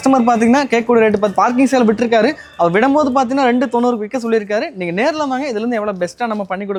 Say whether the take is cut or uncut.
uncut